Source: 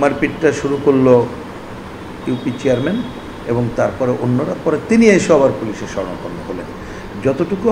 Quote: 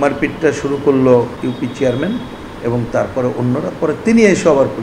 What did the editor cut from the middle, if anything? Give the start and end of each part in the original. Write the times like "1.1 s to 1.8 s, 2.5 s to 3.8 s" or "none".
1.3 s to 2.2 s